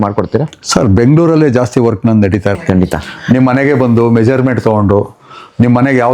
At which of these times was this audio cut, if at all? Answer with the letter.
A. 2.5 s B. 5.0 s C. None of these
A